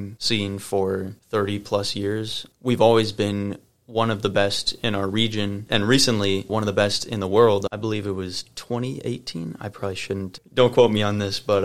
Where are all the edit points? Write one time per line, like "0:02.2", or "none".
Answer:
none